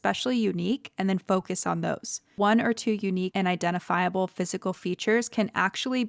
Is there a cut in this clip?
yes; 2 cuts; at 2.3 s, 3.3 s

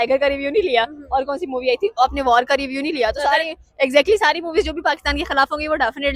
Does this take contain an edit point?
no; 0 cuts

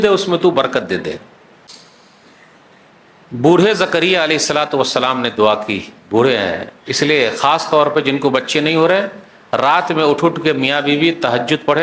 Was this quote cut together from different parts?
yes; 1 cut; at 1.7 s

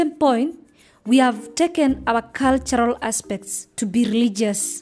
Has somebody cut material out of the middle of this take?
no; 0 cuts

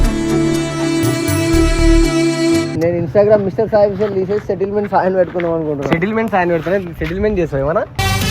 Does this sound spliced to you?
yes; 1 cut; at 2.7 s

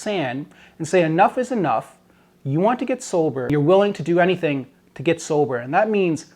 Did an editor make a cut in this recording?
yes; 1 cut; at 3.4 s

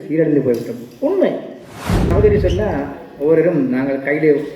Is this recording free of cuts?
no; 1 cut; at 2.1 s

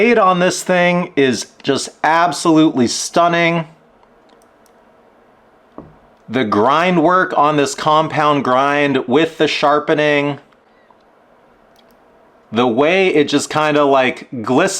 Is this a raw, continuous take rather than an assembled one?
yes; 0 cuts

